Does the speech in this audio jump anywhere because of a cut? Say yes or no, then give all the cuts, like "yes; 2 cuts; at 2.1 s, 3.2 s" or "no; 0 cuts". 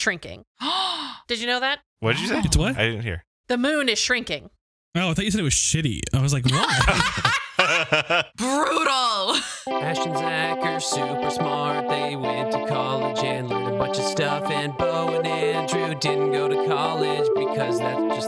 yes; 1 cut; at 9.6 s